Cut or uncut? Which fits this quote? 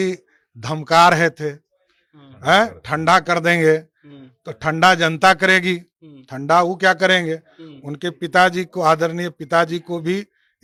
uncut